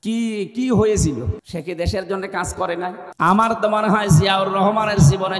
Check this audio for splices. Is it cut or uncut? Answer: cut